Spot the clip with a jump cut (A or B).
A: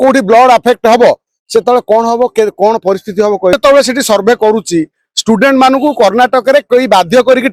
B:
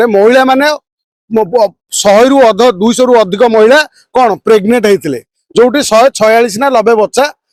A